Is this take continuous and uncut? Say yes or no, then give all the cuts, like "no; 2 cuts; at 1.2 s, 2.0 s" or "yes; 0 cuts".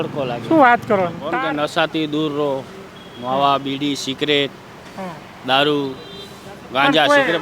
no; 1 cut; at 1.2 s